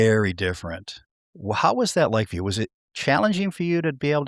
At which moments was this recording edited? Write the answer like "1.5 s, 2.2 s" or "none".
none